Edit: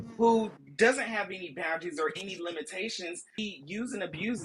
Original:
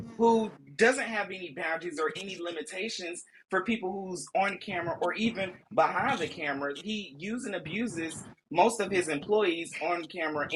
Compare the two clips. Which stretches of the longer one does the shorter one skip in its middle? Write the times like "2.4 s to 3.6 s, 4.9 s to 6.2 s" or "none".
3.3 s to 6.8 s